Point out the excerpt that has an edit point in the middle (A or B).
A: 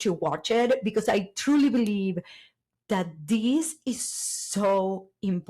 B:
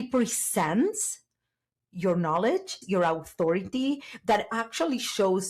B